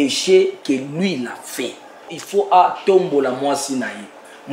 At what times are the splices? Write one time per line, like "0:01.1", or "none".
0:02.2